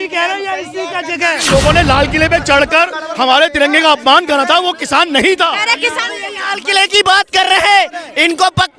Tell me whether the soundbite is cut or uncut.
cut